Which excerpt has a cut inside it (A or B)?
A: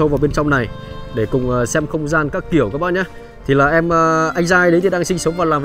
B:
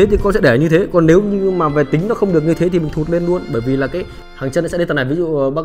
B